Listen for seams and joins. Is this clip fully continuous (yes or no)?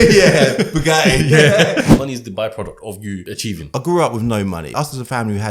no